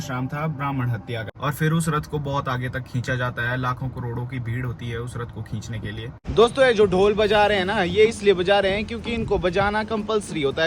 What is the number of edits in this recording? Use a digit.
2